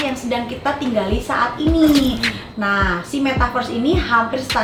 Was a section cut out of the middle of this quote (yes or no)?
no